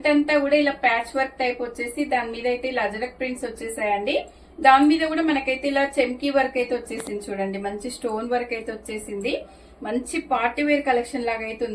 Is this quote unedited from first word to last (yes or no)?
yes